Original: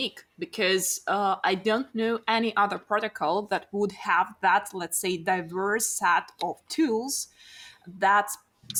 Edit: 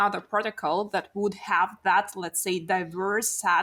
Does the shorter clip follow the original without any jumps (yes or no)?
yes